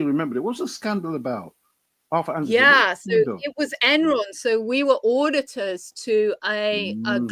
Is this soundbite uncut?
yes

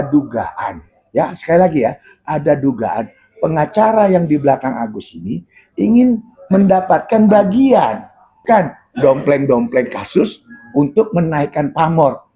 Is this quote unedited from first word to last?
no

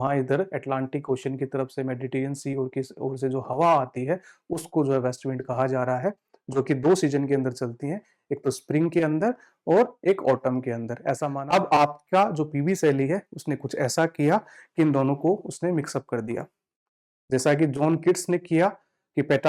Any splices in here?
yes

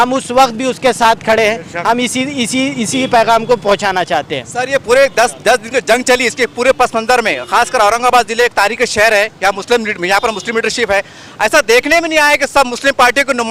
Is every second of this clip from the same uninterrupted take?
yes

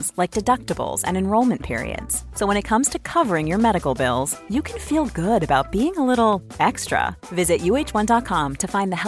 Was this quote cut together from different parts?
no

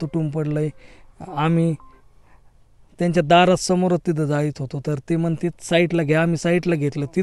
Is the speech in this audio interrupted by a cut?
no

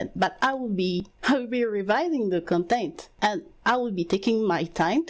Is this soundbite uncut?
no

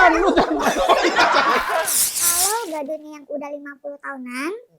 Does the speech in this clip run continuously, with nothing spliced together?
no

